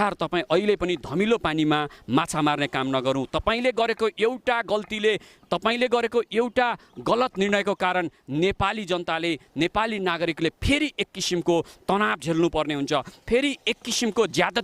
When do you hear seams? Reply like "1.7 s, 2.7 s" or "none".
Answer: none

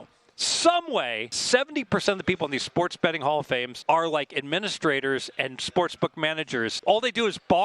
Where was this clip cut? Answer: 1.3 s, 3.7 s, 6.8 s

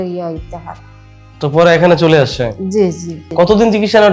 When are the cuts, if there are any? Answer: 3.2 s

